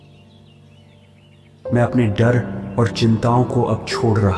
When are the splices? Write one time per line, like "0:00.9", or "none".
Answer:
0:01.7